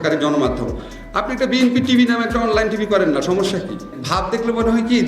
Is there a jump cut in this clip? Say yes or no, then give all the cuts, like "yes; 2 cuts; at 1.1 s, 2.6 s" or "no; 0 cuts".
yes; 1 cut; at 4.0 s